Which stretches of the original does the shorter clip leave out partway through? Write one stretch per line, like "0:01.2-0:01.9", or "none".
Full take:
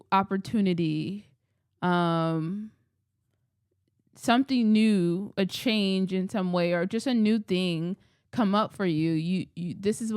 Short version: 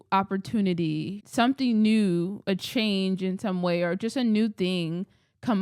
0:01.2-0:04.1

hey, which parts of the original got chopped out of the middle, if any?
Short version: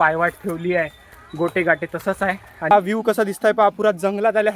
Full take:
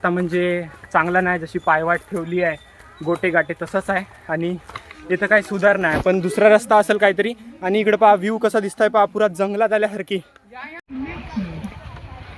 0:04.4-0:08.1

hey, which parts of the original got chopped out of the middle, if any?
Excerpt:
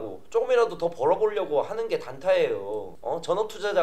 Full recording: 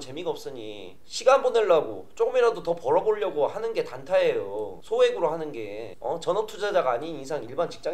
0:04.7-0:05.9

